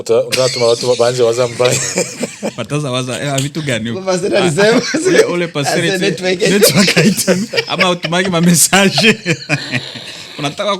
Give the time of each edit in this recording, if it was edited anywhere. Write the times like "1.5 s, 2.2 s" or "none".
none

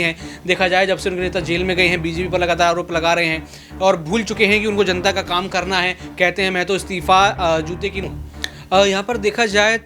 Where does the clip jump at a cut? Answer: 8.1 s

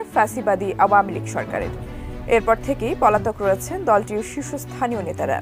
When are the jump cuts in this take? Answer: none

